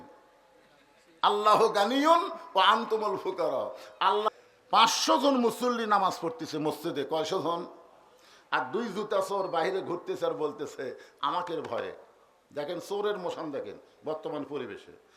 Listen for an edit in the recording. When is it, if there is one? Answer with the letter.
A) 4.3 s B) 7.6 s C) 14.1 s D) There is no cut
A